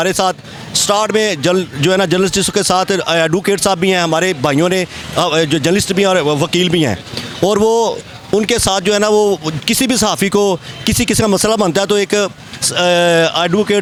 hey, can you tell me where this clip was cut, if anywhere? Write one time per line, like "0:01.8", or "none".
none